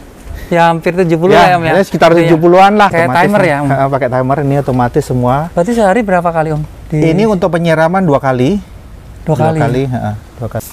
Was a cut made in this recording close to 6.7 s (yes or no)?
no